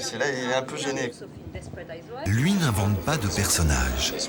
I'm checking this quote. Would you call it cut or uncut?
uncut